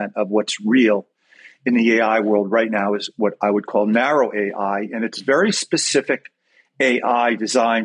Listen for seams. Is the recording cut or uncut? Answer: uncut